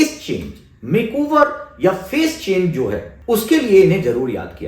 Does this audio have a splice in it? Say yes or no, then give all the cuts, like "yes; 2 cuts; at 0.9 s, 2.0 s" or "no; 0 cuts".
yes; 1 cut; at 3.1 s